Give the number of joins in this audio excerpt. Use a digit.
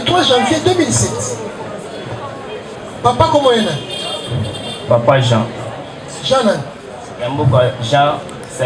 1